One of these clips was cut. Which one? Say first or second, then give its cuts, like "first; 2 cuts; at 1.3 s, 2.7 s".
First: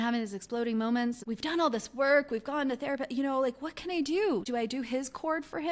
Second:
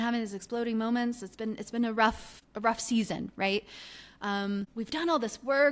first; 2 cuts; at 1.2 s, 4.5 s